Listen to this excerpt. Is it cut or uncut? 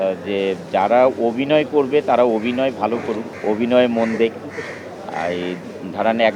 uncut